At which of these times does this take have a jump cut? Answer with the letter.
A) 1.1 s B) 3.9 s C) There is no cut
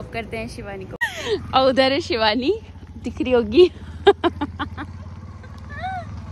A